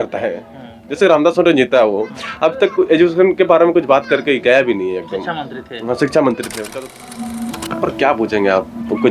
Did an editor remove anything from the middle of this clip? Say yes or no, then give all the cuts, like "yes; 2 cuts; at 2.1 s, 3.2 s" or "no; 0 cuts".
yes; 1 cut; at 6.6 s